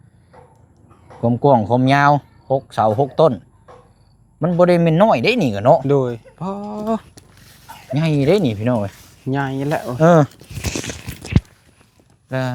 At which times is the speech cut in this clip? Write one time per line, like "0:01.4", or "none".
none